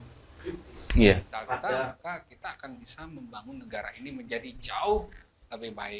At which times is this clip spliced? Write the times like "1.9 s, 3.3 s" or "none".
1.8 s